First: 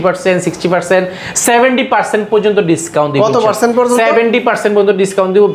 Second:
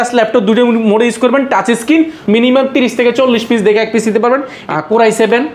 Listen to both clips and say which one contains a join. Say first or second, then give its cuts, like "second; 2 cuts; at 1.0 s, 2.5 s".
second; 2 cuts; at 2.2 s, 4.6 s